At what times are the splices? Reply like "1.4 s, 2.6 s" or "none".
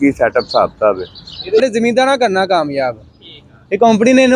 1.6 s